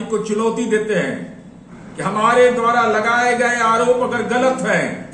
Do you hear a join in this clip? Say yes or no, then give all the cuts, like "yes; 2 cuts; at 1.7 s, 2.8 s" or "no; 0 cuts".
no; 0 cuts